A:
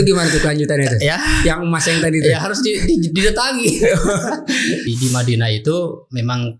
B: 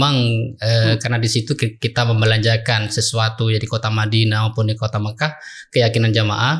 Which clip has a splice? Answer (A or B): A